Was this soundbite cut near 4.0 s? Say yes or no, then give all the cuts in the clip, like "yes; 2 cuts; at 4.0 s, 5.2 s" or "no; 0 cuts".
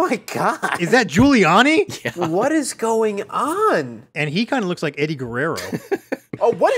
yes; 3 cuts; at 0.9 s, 2.1 s, 4.0 s